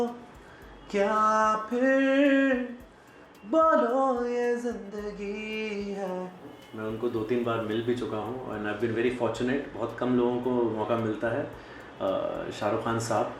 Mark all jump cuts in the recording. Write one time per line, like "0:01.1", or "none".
0:06.6